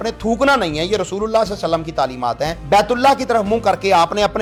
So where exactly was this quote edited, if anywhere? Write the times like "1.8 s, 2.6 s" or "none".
none